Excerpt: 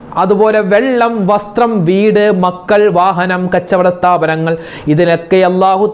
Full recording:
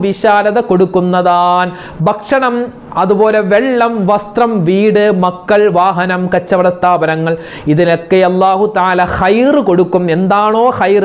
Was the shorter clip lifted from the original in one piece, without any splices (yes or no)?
yes